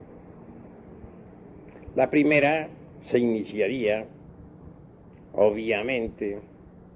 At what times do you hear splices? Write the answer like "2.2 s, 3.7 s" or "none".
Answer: 4.0 s